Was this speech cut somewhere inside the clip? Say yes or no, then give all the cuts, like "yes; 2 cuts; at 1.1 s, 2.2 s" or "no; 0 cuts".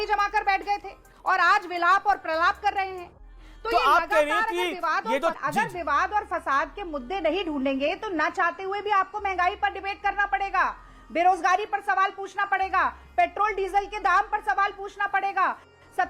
no; 0 cuts